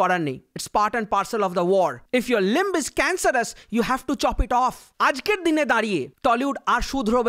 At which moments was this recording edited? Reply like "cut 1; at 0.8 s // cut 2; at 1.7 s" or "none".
cut 1; at 2.0 s // cut 2; at 4.9 s

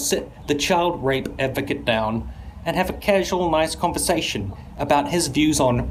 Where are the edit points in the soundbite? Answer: none

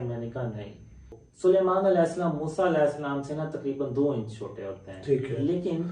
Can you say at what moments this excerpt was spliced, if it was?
cut 1; at 1.2 s

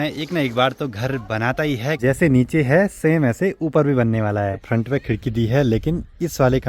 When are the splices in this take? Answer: cut 1; at 2.0 s // cut 2; at 4.6 s

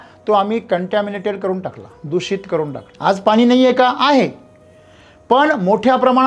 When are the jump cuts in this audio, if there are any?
cut 1; at 2.9 s

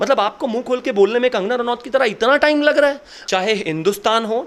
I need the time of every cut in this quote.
cut 1; at 3.1 s

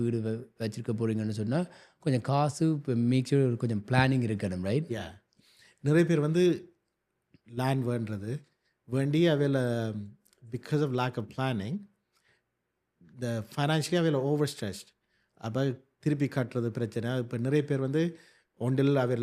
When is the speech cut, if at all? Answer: none

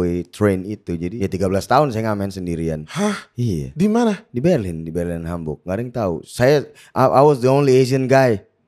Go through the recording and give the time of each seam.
cut 1; at 1.1 s

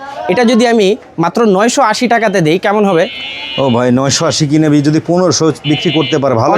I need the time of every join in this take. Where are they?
none

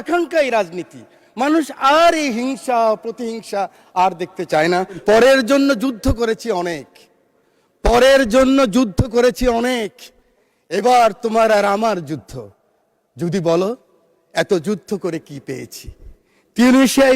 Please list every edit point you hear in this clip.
cut 1; at 5.0 s

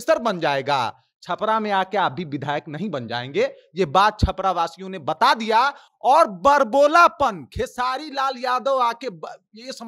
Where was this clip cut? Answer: none

